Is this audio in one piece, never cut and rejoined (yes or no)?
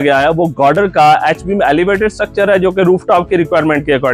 yes